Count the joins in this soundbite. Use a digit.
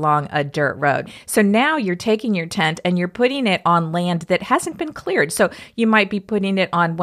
1